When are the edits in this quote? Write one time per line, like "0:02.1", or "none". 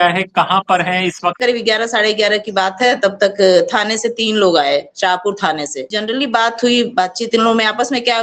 0:01.4
0:05.9